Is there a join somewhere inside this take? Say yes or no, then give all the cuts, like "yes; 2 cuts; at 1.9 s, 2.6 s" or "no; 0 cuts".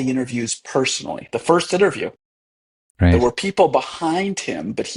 no; 0 cuts